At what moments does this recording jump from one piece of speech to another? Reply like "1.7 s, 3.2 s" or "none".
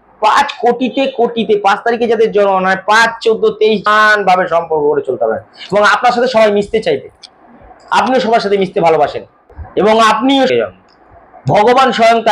3.9 s, 10.5 s